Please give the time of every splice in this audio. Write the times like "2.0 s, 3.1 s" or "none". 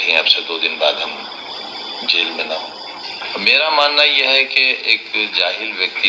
3.0 s